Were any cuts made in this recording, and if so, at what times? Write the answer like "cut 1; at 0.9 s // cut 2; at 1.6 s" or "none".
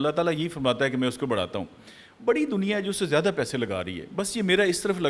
none

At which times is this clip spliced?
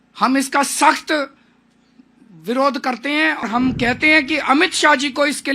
cut 1; at 3.4 s

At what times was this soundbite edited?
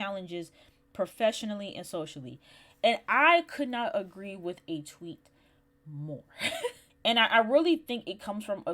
cut 1; at 6.9 s

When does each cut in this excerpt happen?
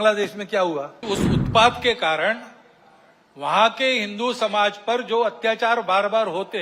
cut 1; at 0.9 s

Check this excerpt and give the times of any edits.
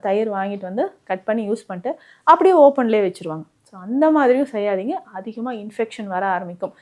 none

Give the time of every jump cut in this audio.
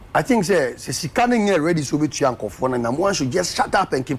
none

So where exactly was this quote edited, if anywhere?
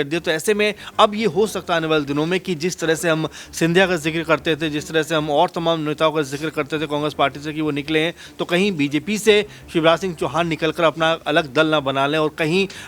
none

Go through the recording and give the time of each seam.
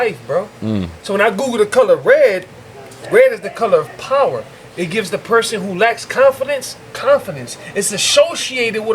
none

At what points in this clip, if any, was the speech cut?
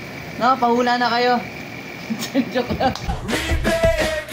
cut 1; at 3.0 s

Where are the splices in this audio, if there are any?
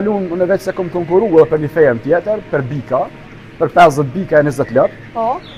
none

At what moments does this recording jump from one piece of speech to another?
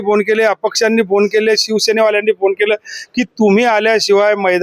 none

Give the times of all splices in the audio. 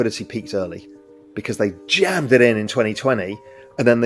none

